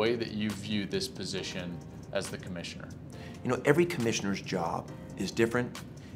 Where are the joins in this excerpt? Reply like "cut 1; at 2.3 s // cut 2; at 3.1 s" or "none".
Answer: cut 1; at 3.1 s